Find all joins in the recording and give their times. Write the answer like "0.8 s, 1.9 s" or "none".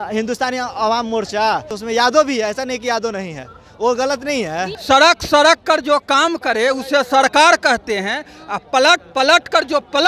1.7 s, 4.8 s